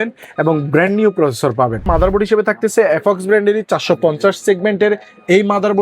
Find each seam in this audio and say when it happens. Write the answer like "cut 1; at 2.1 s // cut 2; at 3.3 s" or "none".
cut 1; at 1.9 s